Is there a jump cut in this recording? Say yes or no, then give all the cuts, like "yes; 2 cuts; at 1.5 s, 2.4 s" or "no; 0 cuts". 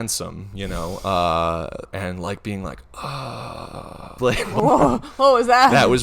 yes; 2 cuts; at 1.9 s, 4.2 s